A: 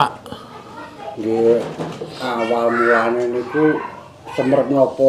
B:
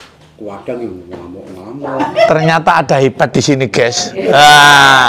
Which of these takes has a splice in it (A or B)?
B